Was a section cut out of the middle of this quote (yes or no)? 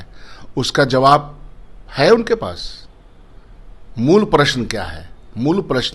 no